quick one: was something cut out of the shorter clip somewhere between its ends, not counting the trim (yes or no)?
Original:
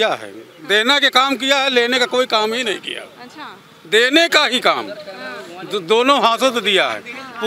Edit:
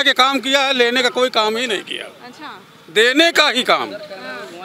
no